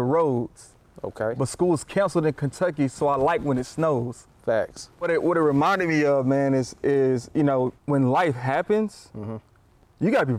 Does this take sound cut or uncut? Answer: cut